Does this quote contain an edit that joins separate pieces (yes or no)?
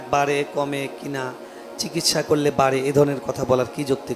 no